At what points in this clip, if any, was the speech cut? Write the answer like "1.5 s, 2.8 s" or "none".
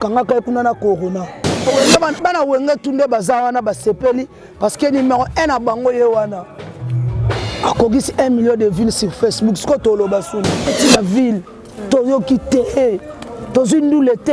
1.7 s, 10.7 s